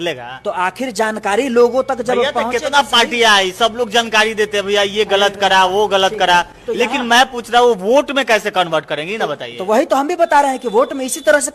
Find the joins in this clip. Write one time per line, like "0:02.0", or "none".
none